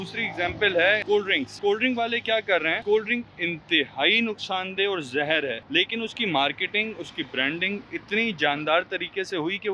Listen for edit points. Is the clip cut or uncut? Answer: cut